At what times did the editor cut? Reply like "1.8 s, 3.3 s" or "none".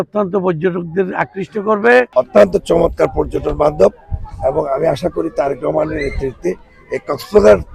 2.1 s